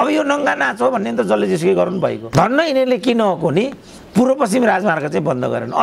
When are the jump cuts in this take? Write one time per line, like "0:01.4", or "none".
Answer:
0:02.2